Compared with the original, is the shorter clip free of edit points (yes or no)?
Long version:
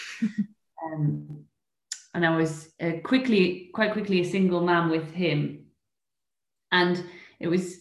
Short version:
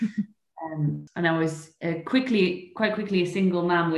no